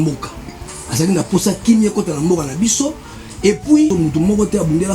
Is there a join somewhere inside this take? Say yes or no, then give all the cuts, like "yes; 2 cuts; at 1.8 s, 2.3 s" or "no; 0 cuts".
yes; 1 cut; at 3.9 s